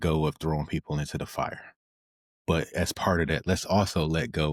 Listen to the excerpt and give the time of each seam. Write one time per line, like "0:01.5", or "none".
none

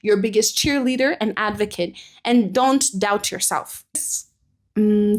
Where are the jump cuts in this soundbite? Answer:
0:04.0

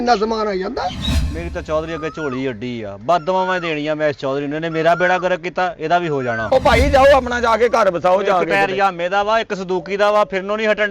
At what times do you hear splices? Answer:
0:01.2
0:06.4

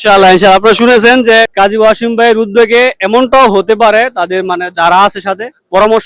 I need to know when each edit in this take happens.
0:01.5

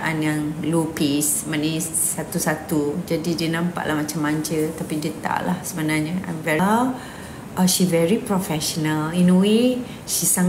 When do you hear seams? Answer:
0:06.6

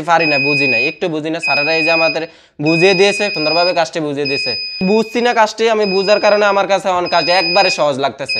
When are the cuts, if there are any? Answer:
0:03.4
0:04.8

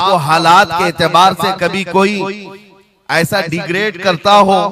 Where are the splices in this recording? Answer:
none

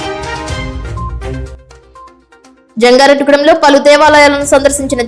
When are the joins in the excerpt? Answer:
0:00.9
0:02.1

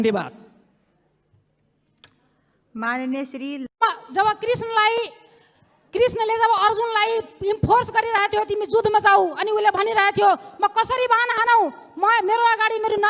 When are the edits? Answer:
0:03.8

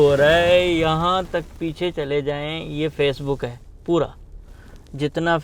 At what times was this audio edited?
none

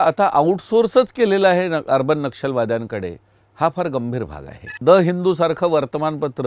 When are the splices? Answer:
0:04.8

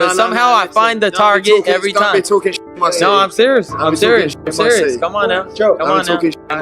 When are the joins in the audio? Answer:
0:05.7

